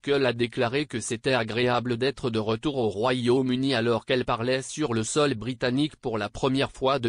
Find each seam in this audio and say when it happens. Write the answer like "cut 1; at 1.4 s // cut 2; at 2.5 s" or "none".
cut 1; at 4.6 s

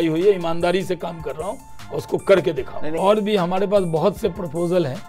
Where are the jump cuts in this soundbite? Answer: cut 1; at 2.9 s

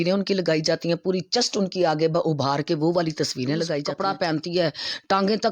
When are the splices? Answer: cut 1; at 3.9 s

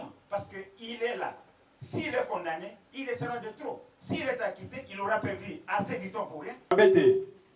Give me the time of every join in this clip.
cut 1; at 6.6 s

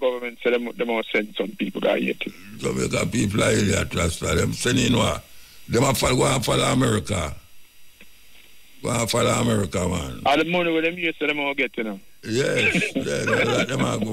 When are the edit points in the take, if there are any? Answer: none

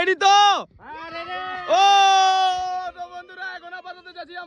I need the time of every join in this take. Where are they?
none

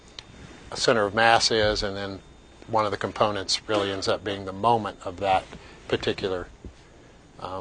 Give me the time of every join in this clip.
cut 1; at 4.4 s

